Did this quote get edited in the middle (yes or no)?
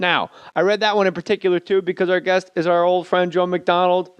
yes